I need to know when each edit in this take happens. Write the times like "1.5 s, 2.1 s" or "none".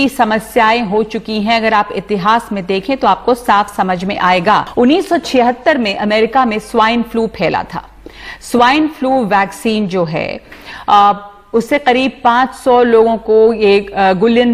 4.7 s